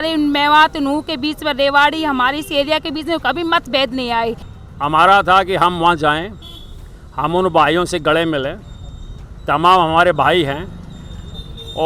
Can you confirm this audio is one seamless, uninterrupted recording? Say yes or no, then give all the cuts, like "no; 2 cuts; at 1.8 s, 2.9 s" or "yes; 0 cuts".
no; 1 cut; at 4.5 s